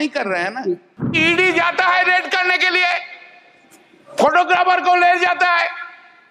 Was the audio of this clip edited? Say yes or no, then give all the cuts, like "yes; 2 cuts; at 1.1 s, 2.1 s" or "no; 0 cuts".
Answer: yes; 1 cut; at 1.1 s